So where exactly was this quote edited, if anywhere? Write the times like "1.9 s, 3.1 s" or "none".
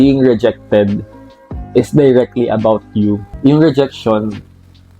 3.3 s